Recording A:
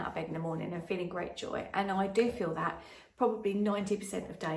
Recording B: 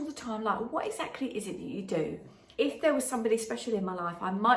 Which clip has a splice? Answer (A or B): B